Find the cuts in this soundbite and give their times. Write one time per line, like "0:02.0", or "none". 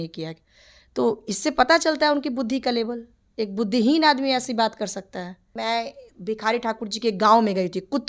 0:05.5